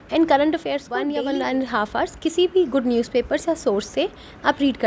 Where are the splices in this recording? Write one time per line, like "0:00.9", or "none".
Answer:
0:01.0